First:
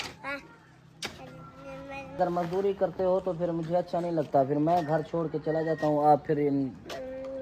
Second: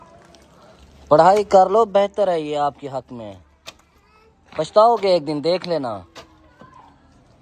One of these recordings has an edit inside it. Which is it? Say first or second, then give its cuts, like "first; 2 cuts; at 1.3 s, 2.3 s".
first; 1 cut; at 2.2 s